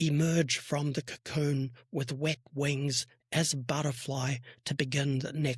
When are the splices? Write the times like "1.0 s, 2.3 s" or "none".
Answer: none